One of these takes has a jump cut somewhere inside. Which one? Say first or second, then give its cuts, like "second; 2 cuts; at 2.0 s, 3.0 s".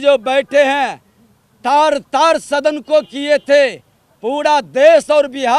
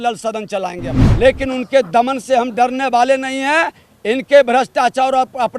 second; 1 cut; at 1.0 s